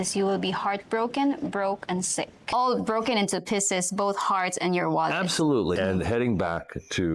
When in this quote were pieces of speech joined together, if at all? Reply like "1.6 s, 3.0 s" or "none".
2.5 s, 5.8 s